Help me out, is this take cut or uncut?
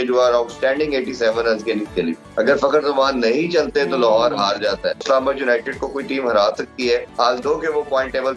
cut